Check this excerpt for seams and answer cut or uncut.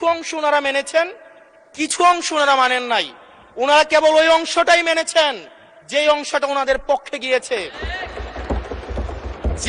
uncut